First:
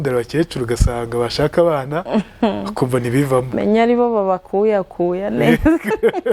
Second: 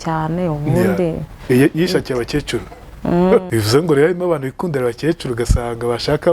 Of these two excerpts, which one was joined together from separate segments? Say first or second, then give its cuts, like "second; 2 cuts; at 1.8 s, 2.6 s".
second; 1 cut; at 3.5 s